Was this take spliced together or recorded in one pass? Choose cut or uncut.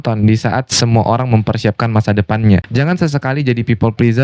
cut